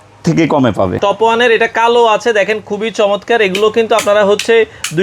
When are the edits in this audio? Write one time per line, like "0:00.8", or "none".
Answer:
0:00.9